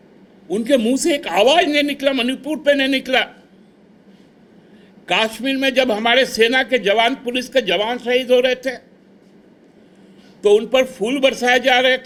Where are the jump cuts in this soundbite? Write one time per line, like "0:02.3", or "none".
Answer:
none